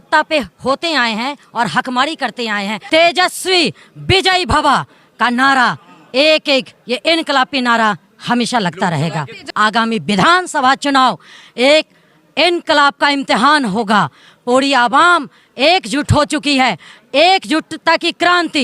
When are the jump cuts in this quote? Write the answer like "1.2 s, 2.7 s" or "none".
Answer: 2.7 s, 9.4 s